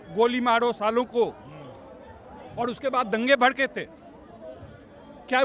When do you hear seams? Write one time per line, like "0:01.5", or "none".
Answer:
none